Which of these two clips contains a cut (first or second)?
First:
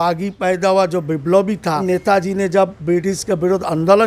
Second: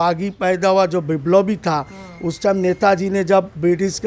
first